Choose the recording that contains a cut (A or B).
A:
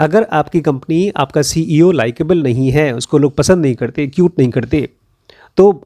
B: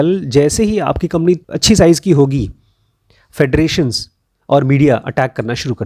B